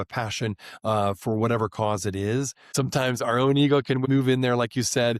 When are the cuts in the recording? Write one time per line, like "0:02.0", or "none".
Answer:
0:04.0